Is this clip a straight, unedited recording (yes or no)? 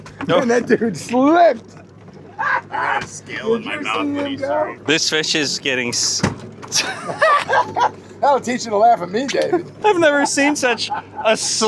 no